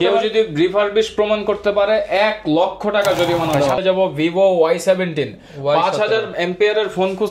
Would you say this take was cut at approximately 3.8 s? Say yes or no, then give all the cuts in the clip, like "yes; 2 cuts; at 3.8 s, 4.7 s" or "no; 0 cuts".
yes; 1 cut; at 3.8 s